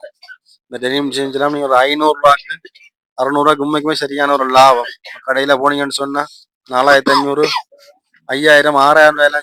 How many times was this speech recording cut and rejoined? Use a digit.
0